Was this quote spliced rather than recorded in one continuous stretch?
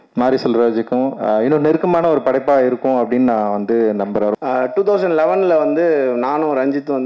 yes; 1 cut; at 4.4 s

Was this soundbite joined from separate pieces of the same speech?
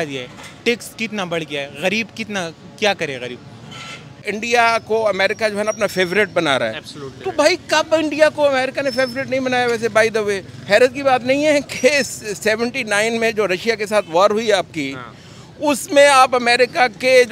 yes; 1 cut; at 4.2 s

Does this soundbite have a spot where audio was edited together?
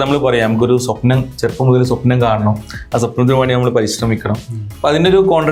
no; 0 cuts

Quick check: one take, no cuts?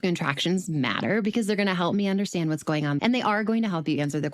no; 1 cut; at 3.0 s

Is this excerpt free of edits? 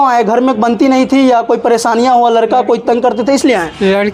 yes; 0 cuts

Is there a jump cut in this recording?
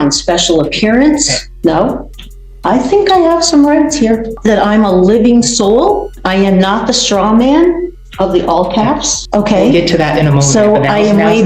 yes; 4 cuts; at 1.4 s, 4.3 s, 6.1 s, 9.2 s

